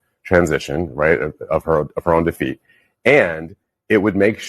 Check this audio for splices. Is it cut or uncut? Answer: cut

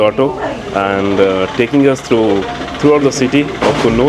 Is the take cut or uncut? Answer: uncut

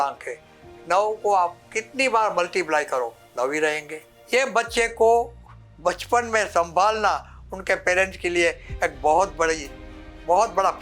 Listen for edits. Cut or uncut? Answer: cut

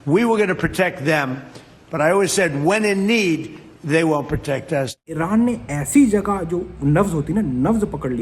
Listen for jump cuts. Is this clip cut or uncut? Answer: cut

